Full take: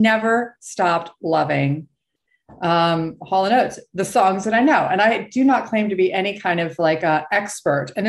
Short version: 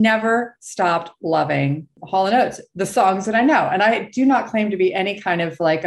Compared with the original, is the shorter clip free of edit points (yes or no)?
no